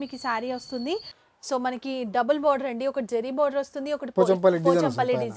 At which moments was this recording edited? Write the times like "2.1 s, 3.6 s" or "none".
1.2 s